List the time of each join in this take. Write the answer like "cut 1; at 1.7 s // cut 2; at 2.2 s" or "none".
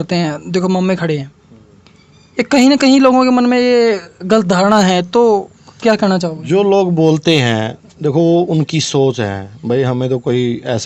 none